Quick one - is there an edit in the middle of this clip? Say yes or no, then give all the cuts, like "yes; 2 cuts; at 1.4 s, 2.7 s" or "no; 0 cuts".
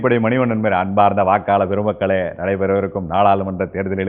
no; 0 cuts